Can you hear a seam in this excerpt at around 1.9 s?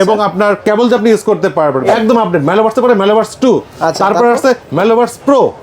yes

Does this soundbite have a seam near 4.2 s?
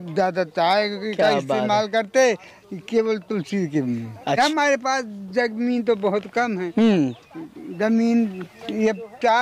yes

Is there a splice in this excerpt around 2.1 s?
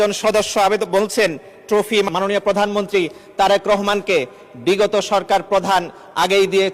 yes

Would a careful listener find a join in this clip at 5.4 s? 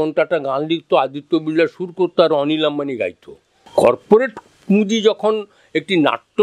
no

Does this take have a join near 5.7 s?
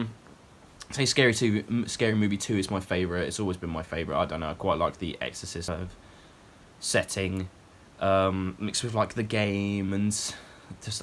yes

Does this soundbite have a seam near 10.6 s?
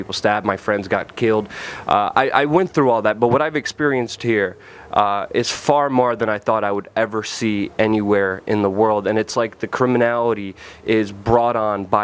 no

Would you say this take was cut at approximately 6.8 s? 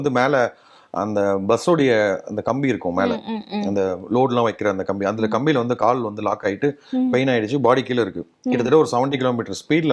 no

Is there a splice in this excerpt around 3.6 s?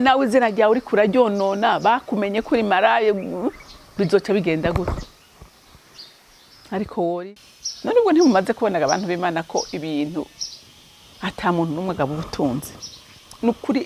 no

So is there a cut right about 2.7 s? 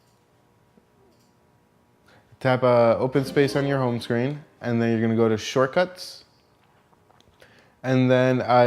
yes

